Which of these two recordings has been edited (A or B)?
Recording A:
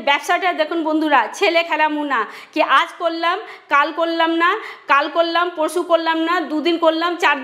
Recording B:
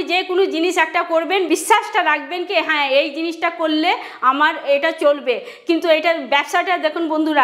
B